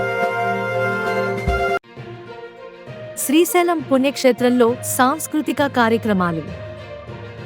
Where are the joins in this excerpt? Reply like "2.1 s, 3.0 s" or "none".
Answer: 1.8 s